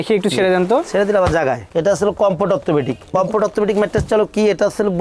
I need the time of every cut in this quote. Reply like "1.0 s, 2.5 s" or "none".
1.7 s